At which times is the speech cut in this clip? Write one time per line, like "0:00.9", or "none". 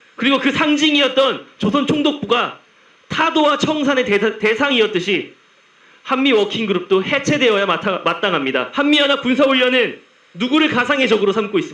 0:08.7